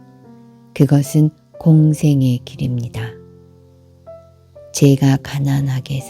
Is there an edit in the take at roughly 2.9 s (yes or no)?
yes